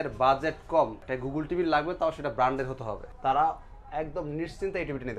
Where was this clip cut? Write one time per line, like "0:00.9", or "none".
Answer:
0:01.1
0:03.0